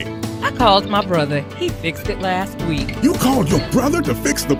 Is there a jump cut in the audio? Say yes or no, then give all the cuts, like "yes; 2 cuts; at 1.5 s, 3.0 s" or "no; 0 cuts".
no; 0 cuts